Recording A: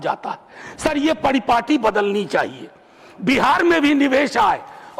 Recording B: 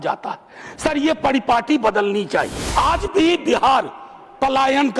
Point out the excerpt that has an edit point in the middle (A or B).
B